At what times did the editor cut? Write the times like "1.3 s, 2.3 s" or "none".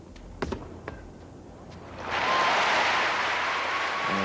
1.1 s